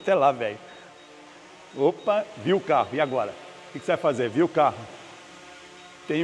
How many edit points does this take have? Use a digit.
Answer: 0